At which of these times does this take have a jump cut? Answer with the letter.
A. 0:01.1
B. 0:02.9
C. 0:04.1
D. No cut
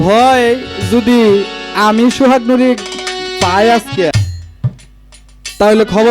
C